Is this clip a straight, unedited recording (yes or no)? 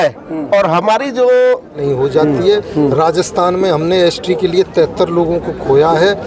no